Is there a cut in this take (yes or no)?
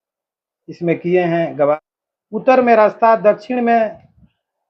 yes